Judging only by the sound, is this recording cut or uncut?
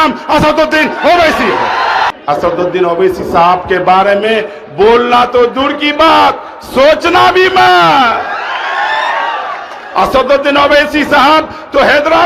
cut